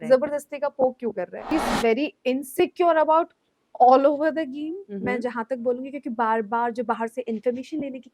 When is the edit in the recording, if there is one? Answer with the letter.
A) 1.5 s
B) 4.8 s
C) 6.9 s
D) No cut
A